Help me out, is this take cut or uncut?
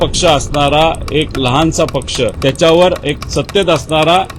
cut